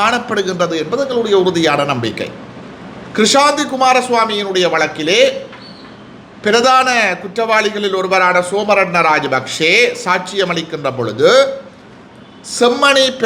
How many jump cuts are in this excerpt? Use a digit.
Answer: 0